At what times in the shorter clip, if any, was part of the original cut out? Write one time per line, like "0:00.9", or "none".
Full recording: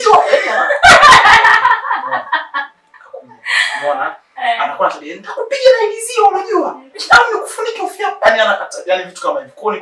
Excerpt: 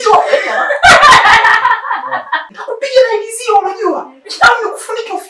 0:02.5